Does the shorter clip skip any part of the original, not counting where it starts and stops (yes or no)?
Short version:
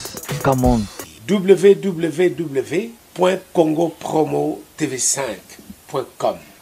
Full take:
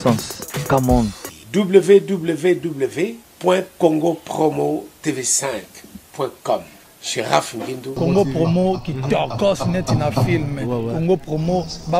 no